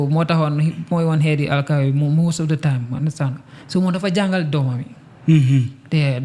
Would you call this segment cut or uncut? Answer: uncut